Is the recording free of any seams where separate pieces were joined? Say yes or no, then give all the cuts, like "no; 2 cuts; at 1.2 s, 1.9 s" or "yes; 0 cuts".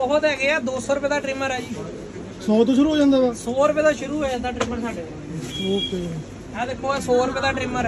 yes; 0 cuts